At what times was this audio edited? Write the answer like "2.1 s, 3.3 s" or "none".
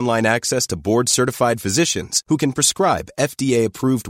none